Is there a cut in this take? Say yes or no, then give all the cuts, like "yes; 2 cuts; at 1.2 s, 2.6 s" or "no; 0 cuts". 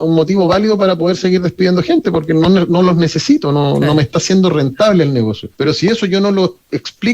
yes; 1 cut; at 5.4 s